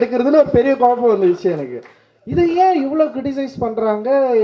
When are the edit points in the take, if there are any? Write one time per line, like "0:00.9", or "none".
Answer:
none